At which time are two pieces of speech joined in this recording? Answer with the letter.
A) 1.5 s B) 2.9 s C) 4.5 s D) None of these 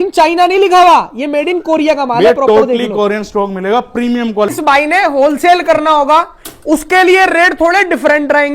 C